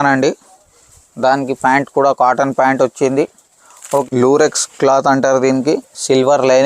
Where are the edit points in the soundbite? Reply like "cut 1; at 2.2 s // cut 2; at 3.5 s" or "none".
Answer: cut 1; at 4.0 s